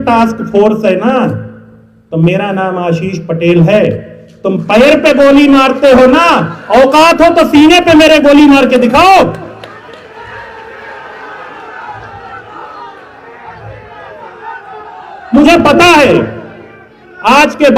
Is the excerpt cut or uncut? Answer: uncut